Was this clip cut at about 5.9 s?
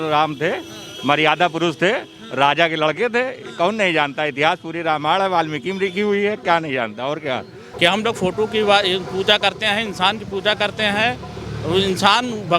no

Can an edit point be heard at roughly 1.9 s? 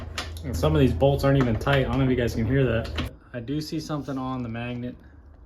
no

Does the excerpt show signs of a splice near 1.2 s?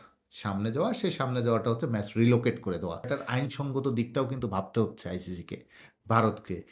no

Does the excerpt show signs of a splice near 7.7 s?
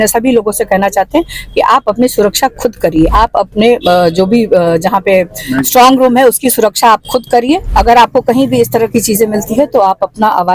yes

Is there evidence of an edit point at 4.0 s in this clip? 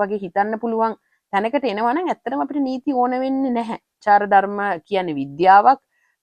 yes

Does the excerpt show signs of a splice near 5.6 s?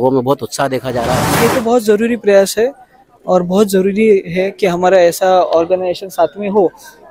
no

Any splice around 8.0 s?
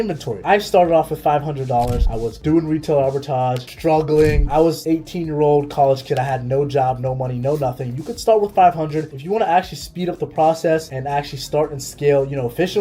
no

